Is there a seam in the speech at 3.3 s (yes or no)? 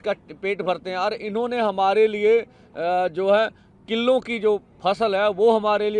no